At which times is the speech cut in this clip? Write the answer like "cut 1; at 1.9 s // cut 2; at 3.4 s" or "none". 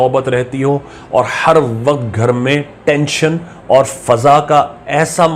none